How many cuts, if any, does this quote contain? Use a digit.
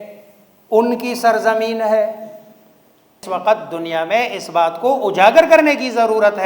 1